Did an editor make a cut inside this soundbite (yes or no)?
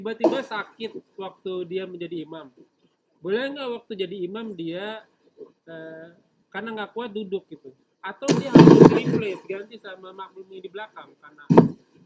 no